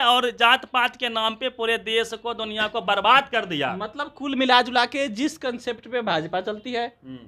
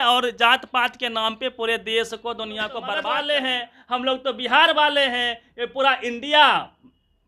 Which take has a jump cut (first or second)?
second